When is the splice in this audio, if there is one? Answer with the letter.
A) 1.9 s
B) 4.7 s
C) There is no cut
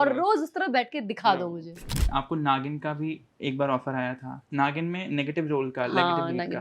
A